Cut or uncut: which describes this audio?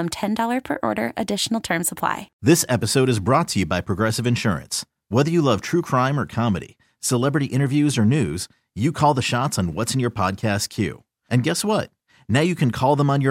cut